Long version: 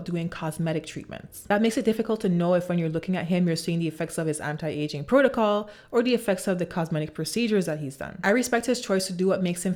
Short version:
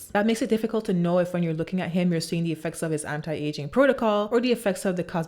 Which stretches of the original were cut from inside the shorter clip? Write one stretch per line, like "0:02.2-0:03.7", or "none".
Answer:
0:05.6-0:05.9